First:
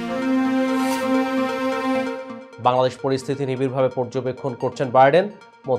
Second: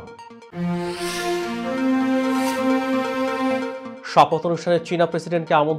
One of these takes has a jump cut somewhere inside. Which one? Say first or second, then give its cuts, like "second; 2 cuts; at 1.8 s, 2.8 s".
first; 1 cut; at 2.3 s